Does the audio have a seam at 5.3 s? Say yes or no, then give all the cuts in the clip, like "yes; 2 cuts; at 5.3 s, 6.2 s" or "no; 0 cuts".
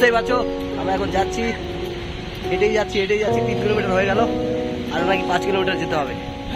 no; 0 cuts